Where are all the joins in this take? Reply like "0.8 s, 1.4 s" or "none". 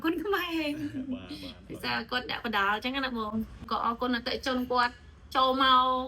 3.7 s